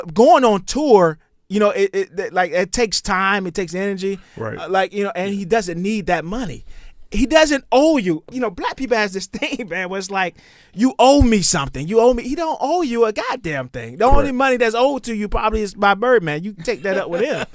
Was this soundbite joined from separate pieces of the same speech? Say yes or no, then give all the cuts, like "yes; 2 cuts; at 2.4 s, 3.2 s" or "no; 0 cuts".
yes; 1 cut; at 8.3 s